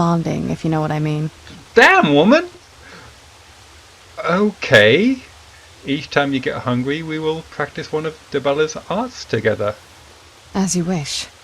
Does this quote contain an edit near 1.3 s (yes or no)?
yes